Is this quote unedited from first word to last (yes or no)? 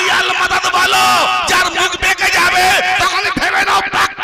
yes